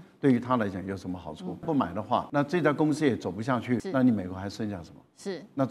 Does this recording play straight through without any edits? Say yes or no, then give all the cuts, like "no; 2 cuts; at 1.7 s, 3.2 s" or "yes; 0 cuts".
no; 2 cuts; at 2.0 s, 3.9 s